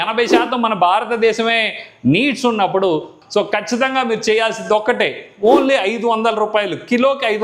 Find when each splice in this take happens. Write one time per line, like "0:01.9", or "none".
0:03.2